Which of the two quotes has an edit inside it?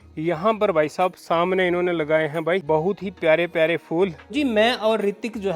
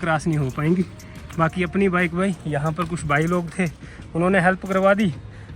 first; 2 cuts; at 2.6 s, 4.2 s

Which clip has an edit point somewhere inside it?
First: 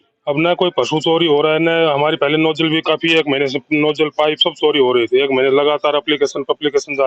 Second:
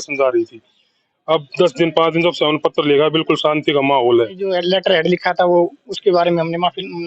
second; 1 cut; at 4.6 s

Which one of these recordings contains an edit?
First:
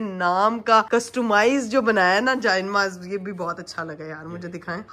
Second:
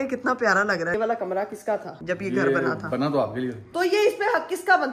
second; 3 cuts; at 0.9 s, 1.9 s, 3.7 s

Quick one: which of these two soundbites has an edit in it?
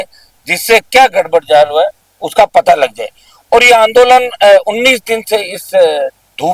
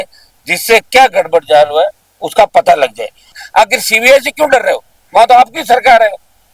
second; 1 cut; at 3.4 s

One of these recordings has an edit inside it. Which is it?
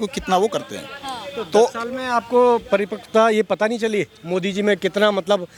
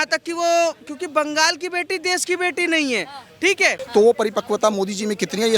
second; 1 cut; at 3.8 s

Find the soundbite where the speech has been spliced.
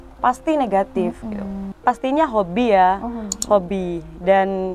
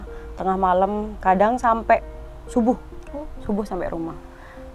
first; 1 cut; at 1.6 s

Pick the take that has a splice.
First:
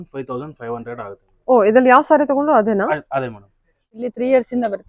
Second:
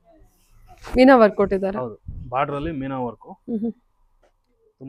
first; 1 cut; at 3.9 s

